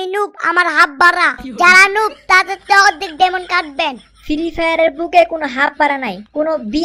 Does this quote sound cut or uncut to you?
uncut